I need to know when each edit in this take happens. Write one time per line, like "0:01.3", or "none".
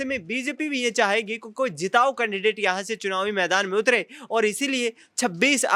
none